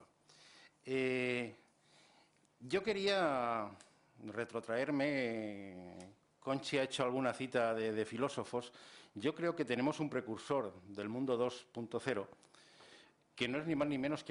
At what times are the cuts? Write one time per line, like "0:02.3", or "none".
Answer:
none